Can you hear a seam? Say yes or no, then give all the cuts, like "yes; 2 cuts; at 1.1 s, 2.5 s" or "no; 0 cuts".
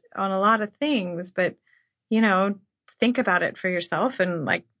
no; 0 cuts